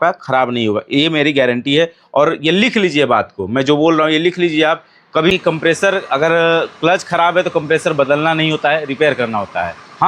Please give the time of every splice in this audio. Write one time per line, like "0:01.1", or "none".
0:05.3